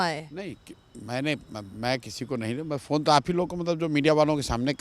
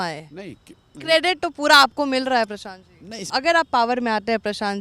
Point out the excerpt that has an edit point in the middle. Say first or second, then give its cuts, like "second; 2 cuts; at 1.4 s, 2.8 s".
second; 2 cuts; at 0.9 s, 3.3 s